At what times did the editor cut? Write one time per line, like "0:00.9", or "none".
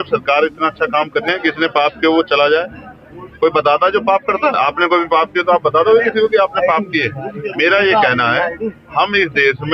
0:01.3